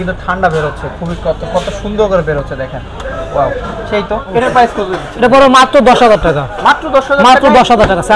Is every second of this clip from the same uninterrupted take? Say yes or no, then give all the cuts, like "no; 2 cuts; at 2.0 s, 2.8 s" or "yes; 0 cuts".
no; 1 cut; at 4.2 s